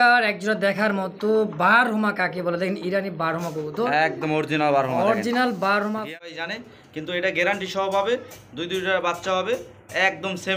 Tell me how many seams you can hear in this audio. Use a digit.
1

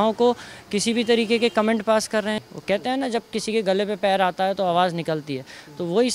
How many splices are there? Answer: 1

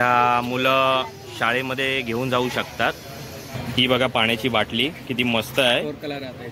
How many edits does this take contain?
1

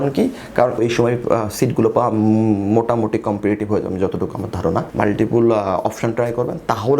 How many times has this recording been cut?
2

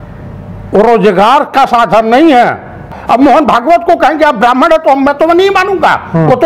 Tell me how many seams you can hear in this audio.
1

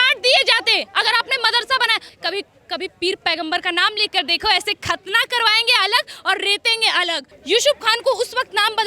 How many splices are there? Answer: 2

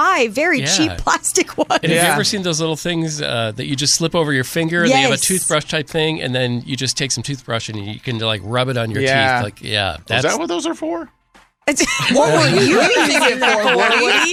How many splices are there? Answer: 0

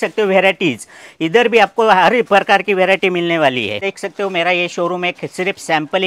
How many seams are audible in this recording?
1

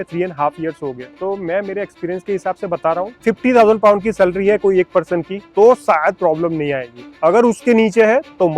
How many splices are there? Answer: 3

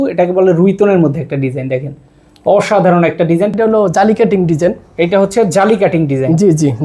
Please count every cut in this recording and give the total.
1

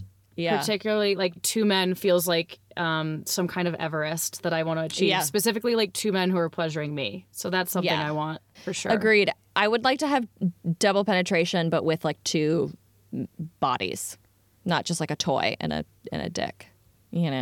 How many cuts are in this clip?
2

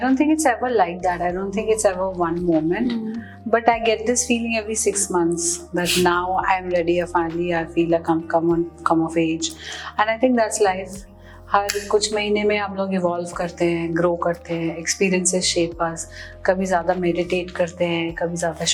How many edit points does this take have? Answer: 0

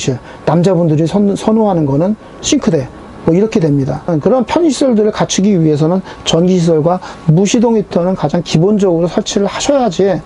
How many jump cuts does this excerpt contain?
0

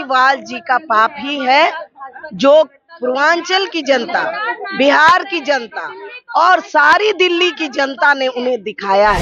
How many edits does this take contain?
0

